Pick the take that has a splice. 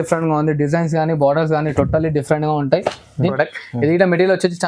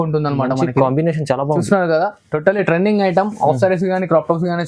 first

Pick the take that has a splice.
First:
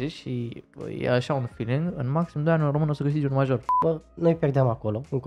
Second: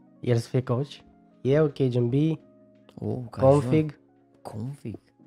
first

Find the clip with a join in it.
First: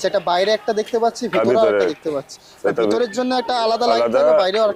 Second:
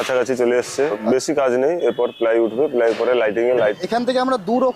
second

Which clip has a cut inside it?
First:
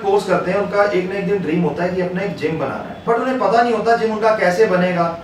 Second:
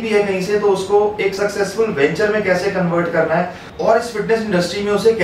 first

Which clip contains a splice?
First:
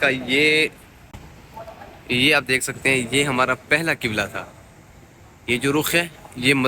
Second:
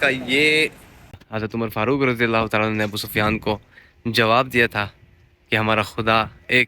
second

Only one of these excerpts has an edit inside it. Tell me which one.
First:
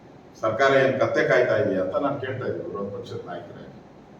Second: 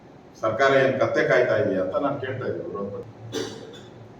second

